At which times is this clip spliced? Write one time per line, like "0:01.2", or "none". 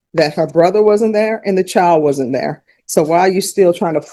none